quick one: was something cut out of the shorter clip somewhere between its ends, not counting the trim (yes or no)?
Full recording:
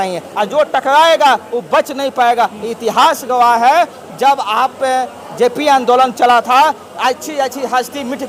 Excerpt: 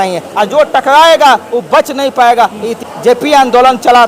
yes